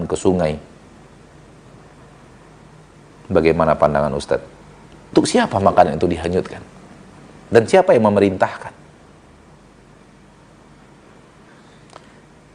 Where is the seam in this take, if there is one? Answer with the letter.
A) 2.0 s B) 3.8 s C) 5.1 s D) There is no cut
C